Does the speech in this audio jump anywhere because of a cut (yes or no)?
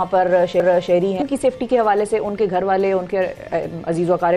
yes